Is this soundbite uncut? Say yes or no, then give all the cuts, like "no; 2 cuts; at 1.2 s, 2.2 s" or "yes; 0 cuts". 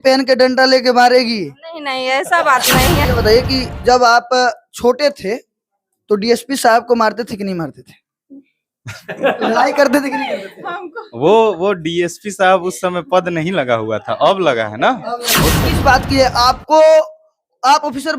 no; 2 cuts; at 3.0 s, 15.6 s